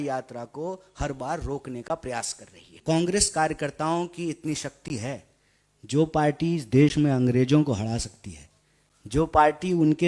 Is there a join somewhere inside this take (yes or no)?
yes